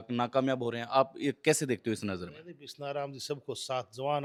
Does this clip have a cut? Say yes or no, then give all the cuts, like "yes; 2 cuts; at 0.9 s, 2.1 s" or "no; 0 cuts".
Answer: no; 0 cuts